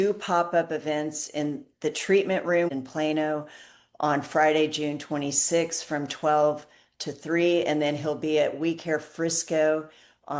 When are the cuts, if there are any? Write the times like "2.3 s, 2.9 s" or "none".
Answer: 2.7 s

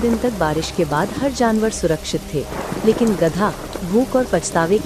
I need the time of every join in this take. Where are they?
none

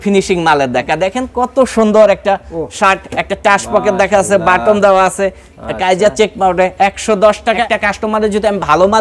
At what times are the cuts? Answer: 0.9 s, 7.6 s

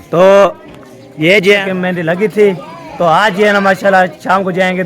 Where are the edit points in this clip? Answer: 1.6 s

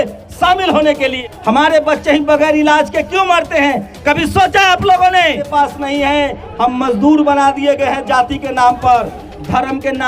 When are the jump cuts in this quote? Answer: 1.2 s, 5.5 s

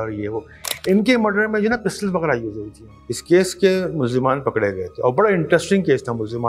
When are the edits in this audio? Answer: 2.9 s

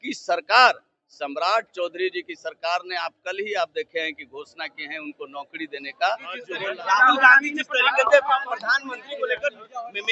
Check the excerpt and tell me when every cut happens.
6.5 s

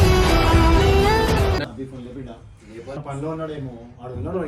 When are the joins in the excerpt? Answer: 1.6 s, 3.0 s

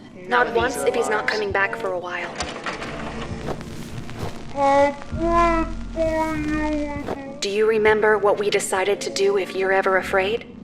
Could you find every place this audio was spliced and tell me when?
none

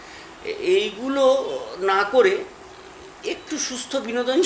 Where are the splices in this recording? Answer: none

